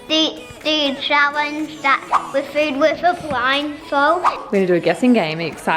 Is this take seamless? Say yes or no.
no